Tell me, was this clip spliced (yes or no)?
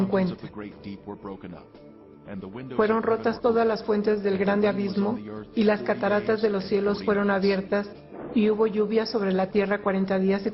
yes